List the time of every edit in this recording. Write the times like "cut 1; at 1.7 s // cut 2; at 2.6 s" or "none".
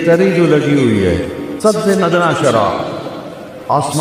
cut 1; at 1.4 s